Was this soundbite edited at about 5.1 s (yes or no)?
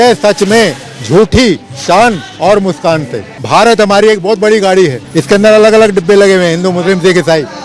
yes